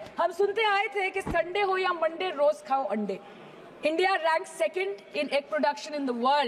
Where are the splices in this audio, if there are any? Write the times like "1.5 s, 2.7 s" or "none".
none